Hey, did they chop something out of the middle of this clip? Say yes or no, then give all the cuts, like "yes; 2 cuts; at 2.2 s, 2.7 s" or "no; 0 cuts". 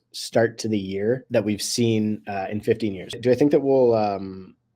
yes; 2 cuts; at 1.2 s, 3.2 s